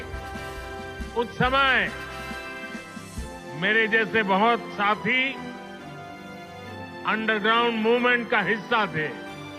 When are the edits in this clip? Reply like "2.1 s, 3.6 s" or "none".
1.8 s, 3.1 s, 5.6 s, 7.0 s